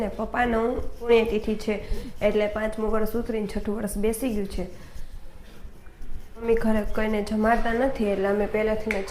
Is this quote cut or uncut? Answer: cut